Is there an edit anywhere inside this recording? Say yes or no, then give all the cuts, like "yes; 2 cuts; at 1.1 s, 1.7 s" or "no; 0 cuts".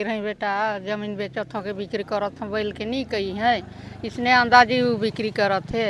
no; 0 cuts